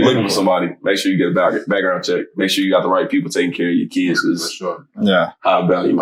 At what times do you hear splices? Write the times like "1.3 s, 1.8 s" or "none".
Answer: none